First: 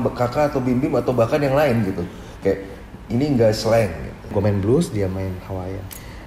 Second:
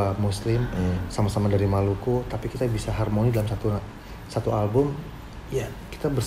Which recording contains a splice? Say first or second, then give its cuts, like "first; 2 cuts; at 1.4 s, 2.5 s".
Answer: first; 1 cut; at 4.3 s